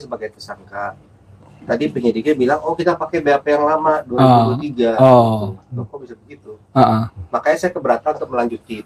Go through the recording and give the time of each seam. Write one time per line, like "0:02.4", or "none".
none